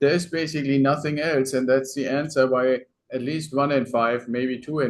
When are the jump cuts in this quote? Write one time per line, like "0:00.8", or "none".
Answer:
none